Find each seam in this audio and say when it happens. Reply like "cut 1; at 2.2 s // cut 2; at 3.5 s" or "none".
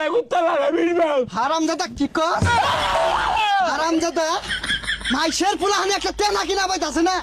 none